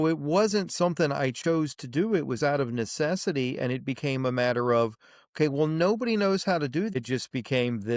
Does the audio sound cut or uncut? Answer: cut